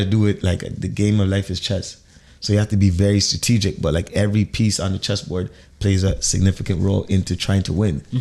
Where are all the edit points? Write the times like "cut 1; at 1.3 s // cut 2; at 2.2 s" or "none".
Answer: none